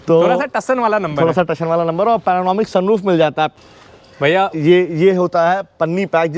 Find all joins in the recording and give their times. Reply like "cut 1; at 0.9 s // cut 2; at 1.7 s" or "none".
cut 1; at 3.5 s